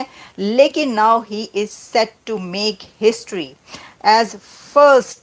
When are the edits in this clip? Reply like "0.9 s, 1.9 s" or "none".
none